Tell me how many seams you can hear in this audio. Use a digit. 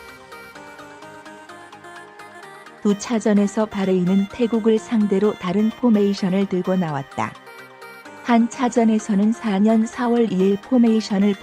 1